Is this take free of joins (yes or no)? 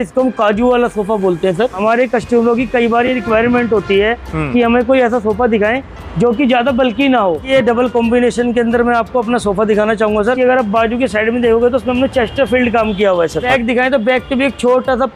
no